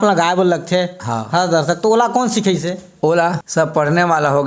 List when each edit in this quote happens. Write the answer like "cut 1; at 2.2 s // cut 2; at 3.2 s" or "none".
cut 1; at 3.4 s